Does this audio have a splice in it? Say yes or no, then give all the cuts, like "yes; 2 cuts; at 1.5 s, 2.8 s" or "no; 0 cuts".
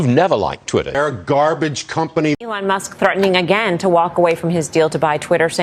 yes; 2 cuts; at 0.9 s, 2.5 s